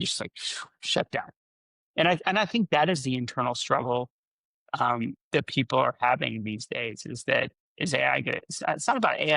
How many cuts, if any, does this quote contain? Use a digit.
2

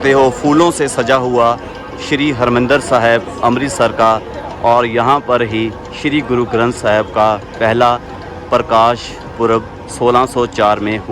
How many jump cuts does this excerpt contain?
0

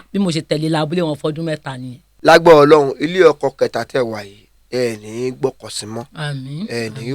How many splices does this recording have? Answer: 1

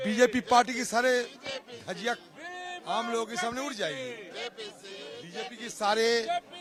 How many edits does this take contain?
0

